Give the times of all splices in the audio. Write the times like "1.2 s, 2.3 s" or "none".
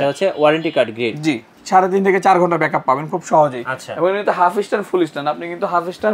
1.6 s